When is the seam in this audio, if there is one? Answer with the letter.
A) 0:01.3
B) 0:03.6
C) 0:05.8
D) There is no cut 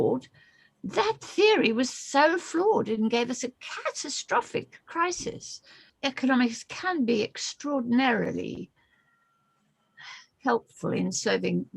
C